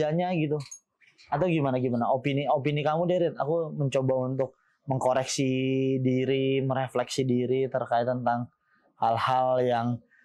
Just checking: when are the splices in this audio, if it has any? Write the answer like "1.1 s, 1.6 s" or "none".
none